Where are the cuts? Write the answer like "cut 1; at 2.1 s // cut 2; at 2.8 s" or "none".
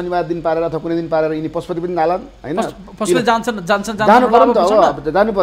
none